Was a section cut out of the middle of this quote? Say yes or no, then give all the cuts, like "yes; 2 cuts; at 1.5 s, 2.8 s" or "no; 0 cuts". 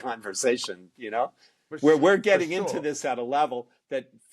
no; 0 cuts